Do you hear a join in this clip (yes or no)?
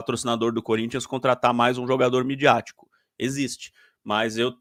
no